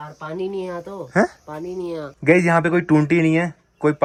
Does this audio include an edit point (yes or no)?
no